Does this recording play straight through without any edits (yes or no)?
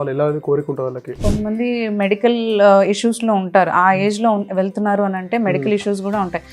no